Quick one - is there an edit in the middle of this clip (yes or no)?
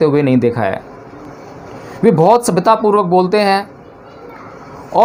no